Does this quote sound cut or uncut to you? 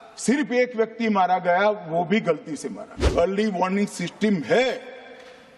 cut